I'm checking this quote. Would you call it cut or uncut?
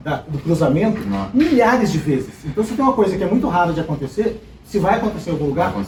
uncut